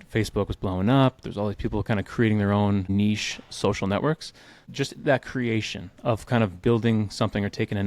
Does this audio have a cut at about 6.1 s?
no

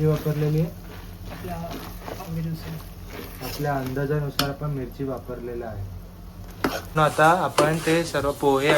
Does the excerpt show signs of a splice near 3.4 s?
no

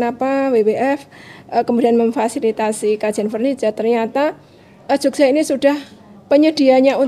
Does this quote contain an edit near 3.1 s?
no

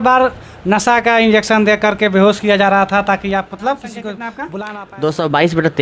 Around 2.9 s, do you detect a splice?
no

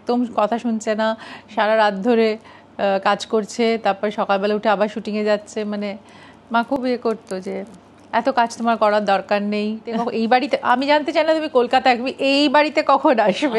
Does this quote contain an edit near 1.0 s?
no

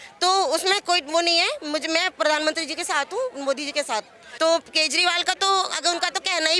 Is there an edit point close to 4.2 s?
yes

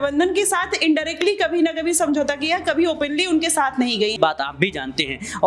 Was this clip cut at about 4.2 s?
yes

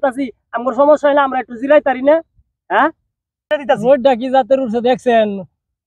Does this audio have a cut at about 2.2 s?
no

